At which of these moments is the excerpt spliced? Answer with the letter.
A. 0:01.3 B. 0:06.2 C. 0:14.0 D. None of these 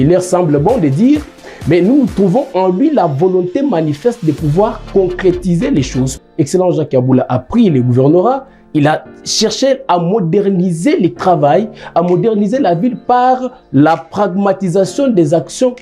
B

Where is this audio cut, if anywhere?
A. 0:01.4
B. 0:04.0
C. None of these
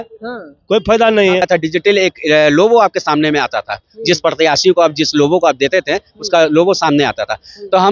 A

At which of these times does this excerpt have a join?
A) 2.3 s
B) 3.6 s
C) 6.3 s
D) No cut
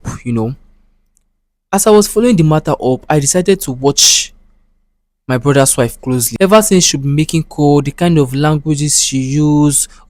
C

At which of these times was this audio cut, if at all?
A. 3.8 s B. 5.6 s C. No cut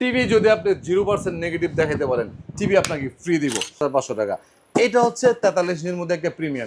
A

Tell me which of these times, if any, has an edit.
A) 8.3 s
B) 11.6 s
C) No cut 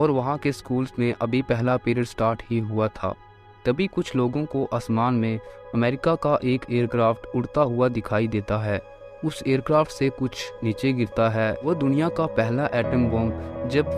B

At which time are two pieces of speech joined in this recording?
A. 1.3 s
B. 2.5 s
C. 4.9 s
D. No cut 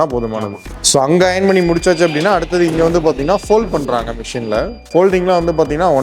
C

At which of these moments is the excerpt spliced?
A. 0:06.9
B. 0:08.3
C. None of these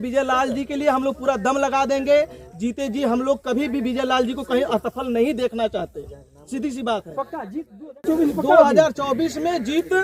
C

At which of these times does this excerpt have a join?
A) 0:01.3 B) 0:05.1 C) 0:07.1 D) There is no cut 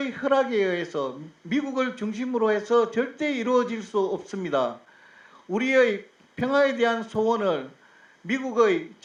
D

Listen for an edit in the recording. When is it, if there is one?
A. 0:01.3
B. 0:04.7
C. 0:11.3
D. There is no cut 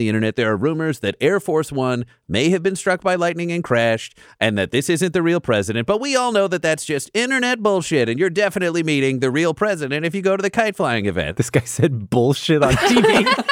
C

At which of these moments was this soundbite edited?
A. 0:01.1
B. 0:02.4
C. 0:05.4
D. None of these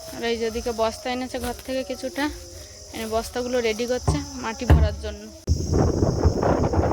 C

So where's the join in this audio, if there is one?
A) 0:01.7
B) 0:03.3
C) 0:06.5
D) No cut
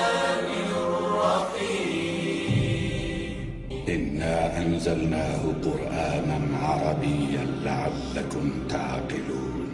D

